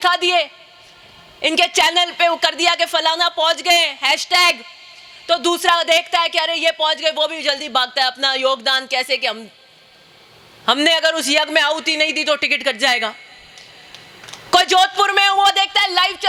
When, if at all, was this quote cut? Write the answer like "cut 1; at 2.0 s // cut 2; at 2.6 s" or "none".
none